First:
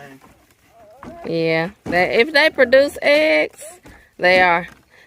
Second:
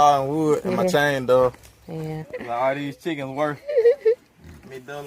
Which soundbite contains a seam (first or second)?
second